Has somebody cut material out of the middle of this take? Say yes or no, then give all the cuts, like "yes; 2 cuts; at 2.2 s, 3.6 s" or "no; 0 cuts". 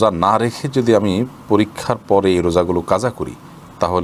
no; 0 cuts